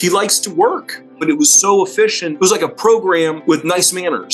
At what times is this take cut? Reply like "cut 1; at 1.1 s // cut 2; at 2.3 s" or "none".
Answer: cut 1; at 1.2 s // cut 2; at 2.2 s // cut 3; at 3.4 s